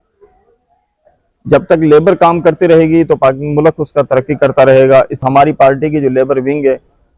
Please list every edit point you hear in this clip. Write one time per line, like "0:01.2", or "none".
0:05.2